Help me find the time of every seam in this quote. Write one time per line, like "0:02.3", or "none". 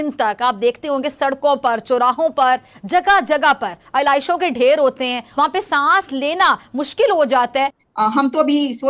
0:05.2
0:07.8